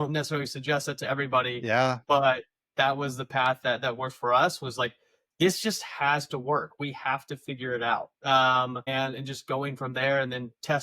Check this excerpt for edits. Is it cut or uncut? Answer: cut